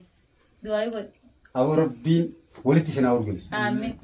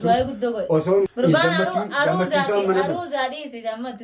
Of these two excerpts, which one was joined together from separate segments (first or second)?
second